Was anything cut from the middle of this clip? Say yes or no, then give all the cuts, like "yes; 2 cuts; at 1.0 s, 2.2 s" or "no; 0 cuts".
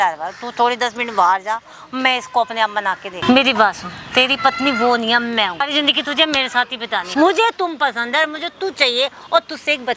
yes; 3 cuts; at 3.1 s, 5.6 s, 7.1 s